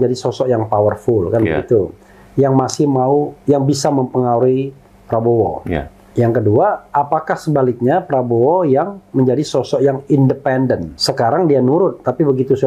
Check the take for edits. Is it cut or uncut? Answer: cut